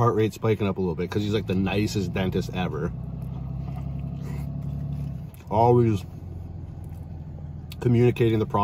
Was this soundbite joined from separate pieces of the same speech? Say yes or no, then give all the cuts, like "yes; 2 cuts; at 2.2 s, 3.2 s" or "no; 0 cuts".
no; 0 cuts